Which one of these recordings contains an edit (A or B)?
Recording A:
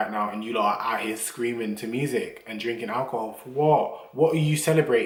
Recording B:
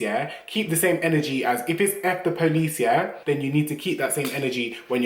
B